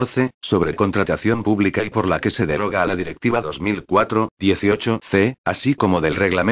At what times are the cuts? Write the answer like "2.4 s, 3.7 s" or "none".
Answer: 5.4 s